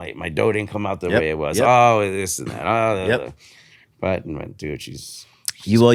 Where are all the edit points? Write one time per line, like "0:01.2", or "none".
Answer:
none

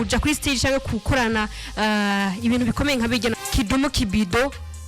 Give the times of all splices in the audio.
0:03.4

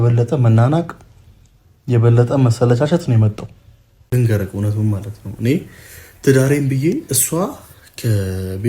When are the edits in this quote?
0:04.0

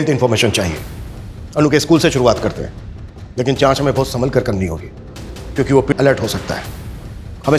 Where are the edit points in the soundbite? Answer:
0:05.9

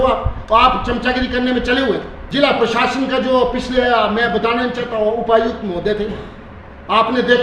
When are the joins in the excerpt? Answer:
0:02.2

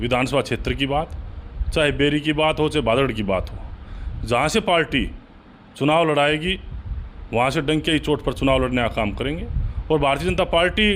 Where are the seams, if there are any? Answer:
none

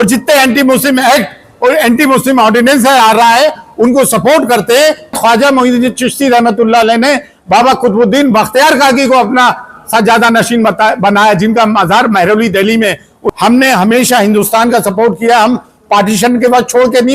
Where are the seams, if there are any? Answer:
0:05.1
0:13.1

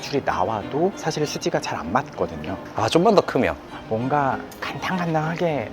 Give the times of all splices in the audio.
0:02.7
0:03.7

